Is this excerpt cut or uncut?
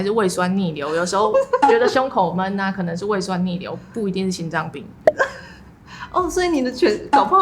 uncut